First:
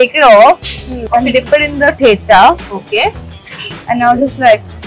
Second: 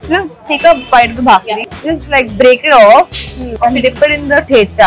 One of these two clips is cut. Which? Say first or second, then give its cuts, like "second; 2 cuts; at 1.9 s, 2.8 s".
first; 1 cut; at 3.3 s